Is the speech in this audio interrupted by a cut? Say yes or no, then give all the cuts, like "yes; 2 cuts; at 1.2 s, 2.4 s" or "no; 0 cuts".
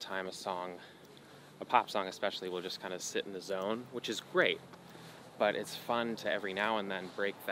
no; 0 cuts